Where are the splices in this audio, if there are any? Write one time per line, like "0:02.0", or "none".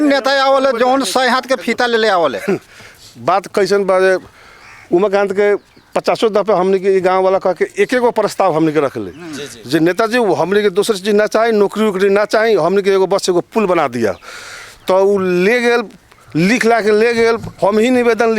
none